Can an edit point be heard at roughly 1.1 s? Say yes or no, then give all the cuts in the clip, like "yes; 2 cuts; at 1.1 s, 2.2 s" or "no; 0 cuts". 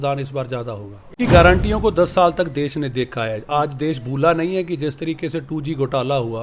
yes; 1 cut; at 1.1 s